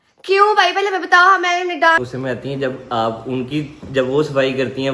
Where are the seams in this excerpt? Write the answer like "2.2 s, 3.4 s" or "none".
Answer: 2.0 s